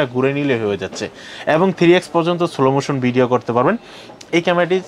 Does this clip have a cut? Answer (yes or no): no